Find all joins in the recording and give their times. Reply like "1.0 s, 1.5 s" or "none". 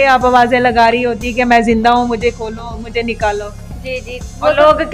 none